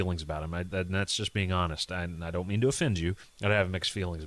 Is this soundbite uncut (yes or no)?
no